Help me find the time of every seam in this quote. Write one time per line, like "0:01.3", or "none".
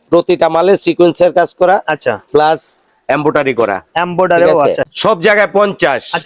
0:04.9